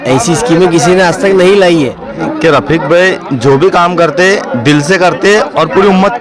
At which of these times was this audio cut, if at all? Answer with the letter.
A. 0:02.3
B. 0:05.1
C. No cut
A